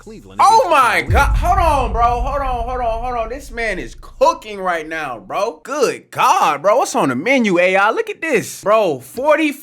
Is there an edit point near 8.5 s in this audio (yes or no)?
yes